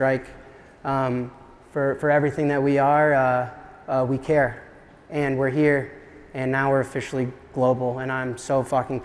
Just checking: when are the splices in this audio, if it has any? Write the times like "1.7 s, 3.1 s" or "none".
none